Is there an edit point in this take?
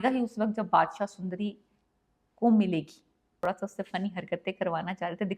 yes; 1 cut; at 3.4 s

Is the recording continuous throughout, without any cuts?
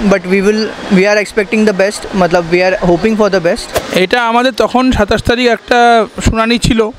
no; 1 cut; at 3.7 s

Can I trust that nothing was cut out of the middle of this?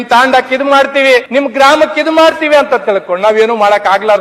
no; 1 cut; at 1.3 s

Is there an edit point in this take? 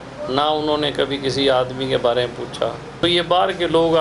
yes; 1 cut; at 3.0 s

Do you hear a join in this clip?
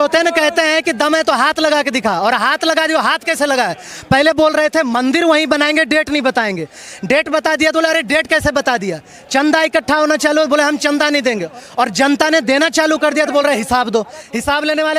no; 0 cuts

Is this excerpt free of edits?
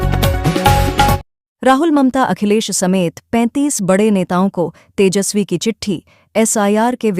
no; 1 cut; at 1.1 s

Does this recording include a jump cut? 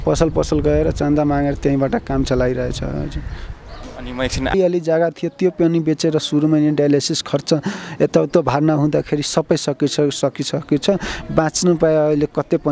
yes; 1 cut; at 4.5 s

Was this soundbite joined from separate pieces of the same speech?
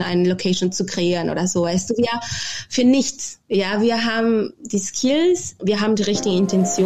yes; 1 cut; at 5.6 s

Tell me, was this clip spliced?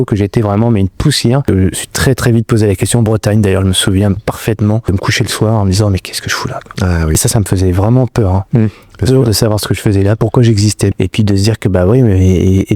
yes; 4 cuts; at 1.5 s, 4.9 s, 7.1 s, 10.9 s

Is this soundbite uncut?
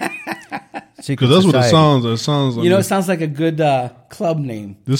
yes; 0 cuts

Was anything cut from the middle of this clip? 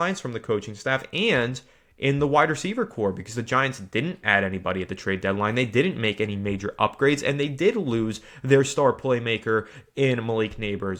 no; 0 cuts

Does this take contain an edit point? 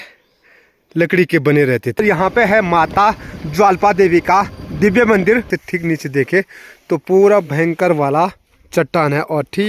yes; 2 cuts; at 2.0 s, 5.5 s

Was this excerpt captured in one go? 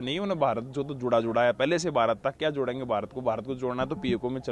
yes; 0 cuts

